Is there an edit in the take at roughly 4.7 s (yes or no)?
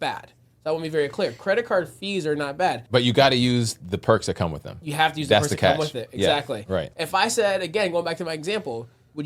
no